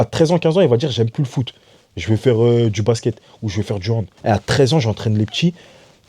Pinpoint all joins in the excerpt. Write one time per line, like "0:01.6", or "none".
0:04.1